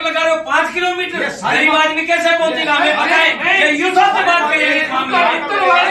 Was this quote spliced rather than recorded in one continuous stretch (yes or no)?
no